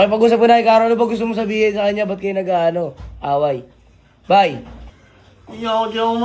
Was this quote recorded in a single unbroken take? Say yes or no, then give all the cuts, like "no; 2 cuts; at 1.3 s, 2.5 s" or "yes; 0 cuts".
no; 1 cut; at 4.9 s